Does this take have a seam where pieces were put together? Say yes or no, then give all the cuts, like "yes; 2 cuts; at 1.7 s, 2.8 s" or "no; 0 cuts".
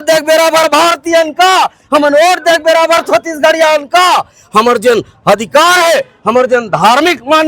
no; 0 cuts